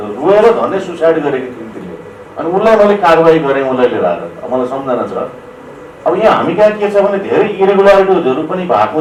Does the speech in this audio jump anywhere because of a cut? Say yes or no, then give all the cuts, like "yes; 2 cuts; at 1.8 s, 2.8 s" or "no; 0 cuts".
no; 0 cuts